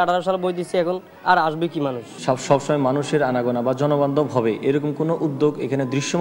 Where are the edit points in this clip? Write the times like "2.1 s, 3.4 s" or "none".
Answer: 2.1 s